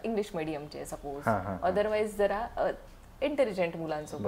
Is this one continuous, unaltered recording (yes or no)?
yes